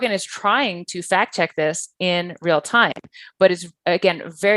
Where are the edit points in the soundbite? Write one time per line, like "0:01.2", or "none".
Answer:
none